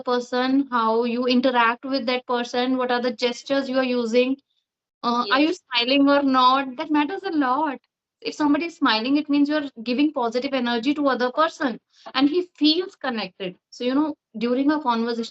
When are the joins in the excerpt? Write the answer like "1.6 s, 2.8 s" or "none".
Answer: none